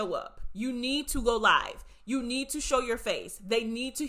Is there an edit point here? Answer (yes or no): no